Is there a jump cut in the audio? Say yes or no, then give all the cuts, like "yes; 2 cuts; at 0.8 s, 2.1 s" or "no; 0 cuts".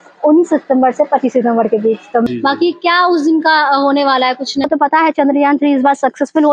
yes; 2 cuts; at 2.3 s, 4.7 s